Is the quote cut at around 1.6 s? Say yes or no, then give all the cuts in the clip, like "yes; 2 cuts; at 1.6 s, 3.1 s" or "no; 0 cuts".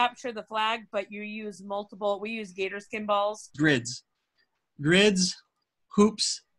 no; 1 cut; at 3.5 s